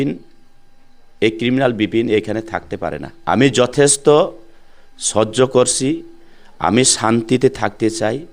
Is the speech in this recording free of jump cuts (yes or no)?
no